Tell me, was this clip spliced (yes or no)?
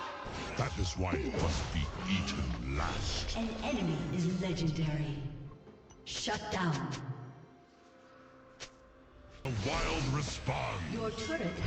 yes